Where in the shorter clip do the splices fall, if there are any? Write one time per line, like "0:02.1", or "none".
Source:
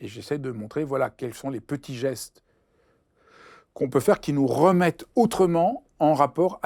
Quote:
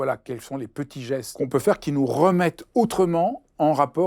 0:01.3